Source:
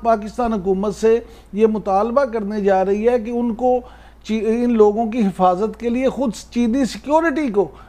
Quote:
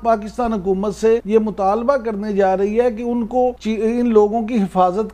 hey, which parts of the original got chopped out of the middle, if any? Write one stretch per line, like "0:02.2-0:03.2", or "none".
0:01.2-0:01.5
0:03.9-0:04.3